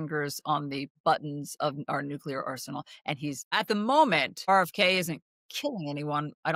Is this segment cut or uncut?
cut